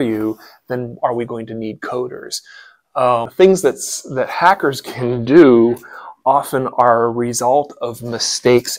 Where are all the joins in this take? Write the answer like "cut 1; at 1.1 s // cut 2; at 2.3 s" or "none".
cut 1; at 3.3 s